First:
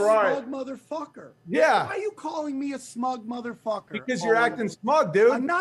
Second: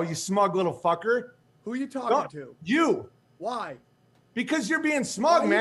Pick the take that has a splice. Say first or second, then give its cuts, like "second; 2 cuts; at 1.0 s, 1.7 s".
second; 1 cut; at 2.2 s